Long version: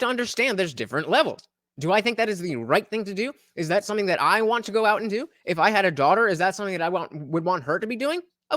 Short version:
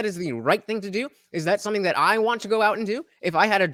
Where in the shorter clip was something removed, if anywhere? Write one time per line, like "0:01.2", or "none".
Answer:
none